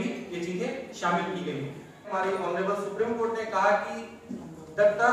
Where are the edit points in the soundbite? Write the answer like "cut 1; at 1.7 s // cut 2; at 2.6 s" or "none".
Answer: cut 1; at 2.1 s